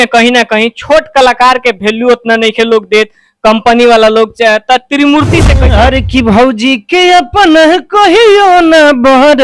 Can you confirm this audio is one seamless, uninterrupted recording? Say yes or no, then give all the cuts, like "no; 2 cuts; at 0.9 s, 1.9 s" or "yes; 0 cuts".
no; 1 cut; at 5.5 s